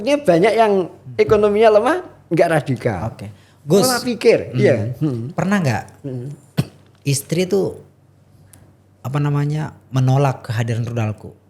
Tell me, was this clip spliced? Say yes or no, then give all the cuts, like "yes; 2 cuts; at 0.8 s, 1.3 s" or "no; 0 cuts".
no; 0 cuts